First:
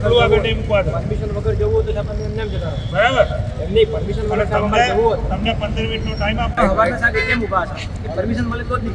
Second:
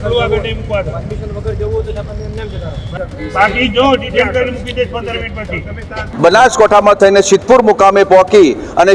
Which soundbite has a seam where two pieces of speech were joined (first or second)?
second